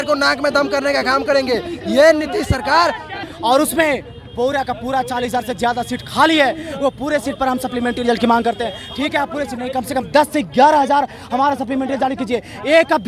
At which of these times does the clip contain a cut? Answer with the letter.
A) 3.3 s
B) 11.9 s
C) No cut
A